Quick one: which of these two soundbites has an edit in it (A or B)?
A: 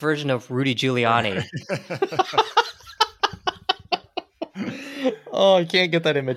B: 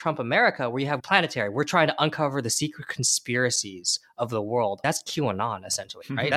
B